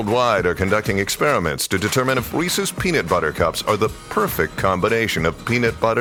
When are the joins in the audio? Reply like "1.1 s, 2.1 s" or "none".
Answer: none